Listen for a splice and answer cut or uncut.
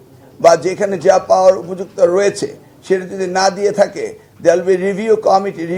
uncut